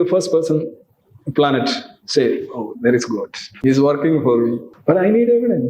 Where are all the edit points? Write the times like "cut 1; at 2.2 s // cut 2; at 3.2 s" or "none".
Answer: cut 1; at 3.5 s // cut 2; at 4.7 s